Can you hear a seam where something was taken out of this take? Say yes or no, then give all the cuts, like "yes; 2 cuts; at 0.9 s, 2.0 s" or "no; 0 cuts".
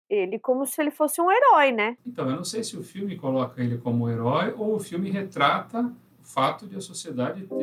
yes; 1 cut; at 2.0 s